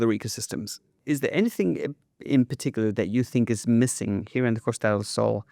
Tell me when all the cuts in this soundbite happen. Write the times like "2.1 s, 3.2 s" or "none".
0.9 s